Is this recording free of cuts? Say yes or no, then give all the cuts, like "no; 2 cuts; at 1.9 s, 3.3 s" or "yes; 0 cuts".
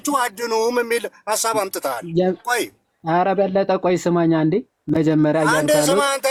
yes; 0 cuts